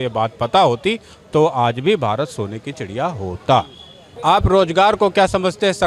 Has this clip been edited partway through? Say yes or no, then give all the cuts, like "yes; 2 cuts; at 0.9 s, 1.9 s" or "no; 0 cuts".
no; 0 cuts